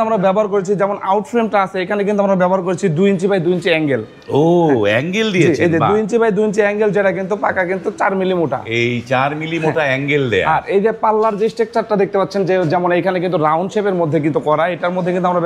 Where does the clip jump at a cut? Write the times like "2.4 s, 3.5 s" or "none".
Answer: none